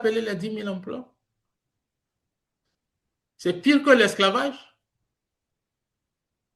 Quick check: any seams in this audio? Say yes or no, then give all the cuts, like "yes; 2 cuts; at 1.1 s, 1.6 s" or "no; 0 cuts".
no; 0 cuts